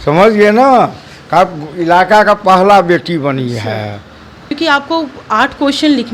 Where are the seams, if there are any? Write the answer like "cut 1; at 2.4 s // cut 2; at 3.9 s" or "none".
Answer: cut 1; at 4.5 s